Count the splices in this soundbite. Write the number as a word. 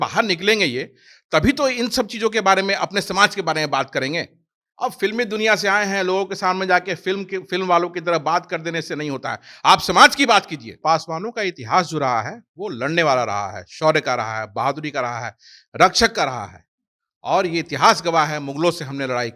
one